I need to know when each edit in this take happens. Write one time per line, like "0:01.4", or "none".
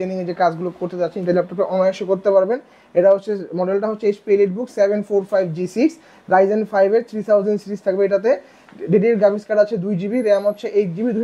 none